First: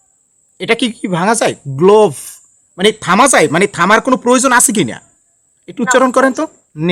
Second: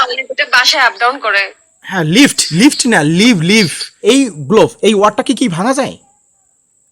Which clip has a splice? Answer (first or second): second